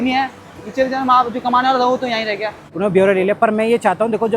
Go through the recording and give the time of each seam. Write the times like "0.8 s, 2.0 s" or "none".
2.6 s